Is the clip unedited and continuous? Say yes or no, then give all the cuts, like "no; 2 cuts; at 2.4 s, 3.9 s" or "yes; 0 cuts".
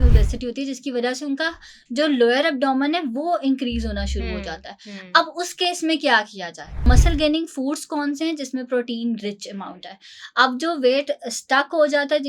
no; 1 cut; at 6.9 s